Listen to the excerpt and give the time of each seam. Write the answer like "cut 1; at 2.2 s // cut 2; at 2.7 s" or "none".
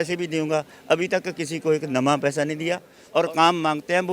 cut 1; at 2.9 s